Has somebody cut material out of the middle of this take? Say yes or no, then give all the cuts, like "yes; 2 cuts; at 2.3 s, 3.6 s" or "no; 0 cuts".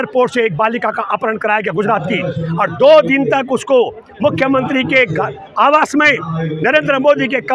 no; 0 cuts